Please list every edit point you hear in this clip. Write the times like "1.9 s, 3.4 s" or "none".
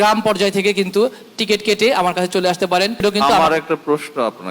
3.0 s